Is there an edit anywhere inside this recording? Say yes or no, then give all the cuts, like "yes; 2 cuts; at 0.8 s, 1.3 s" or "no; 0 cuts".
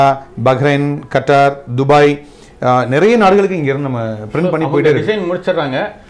no; 0 cuts